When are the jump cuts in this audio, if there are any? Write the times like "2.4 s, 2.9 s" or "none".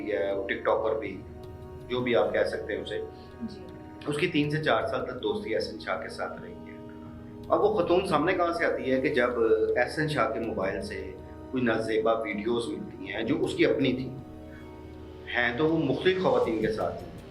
none